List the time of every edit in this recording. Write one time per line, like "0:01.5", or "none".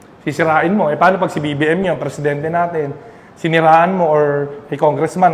none